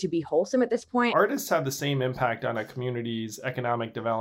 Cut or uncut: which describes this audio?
cut